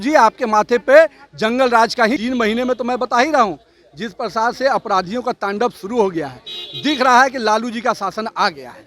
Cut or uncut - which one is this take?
cut